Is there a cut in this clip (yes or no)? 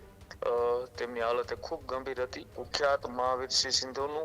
yes